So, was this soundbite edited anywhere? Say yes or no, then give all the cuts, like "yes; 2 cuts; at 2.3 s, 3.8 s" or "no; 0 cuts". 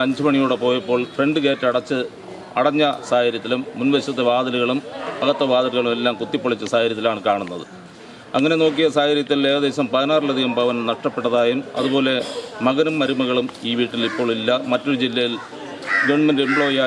no; 0 cuts